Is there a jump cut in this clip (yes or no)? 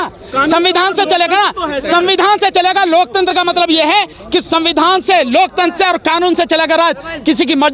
yes